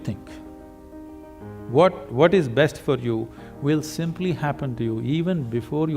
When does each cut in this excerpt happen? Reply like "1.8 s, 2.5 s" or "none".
none